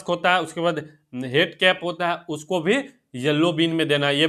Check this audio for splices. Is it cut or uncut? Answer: uncut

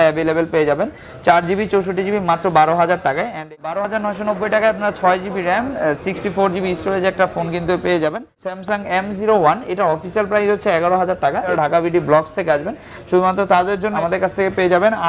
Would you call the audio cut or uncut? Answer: cut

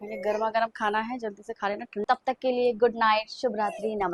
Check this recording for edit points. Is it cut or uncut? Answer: cut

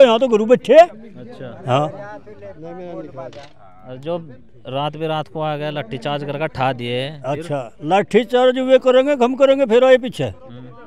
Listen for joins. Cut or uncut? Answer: uncut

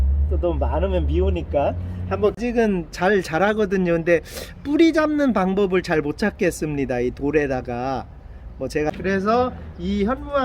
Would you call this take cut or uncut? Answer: cut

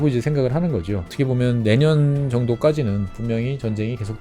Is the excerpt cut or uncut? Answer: cut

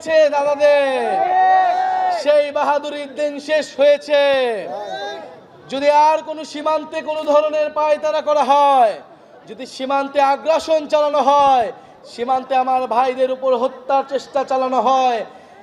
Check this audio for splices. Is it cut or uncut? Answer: uncut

